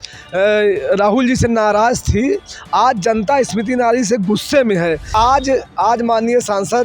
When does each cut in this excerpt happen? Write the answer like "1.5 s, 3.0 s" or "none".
5.1 s